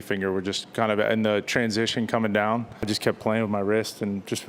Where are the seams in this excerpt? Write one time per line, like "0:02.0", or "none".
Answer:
0:02.8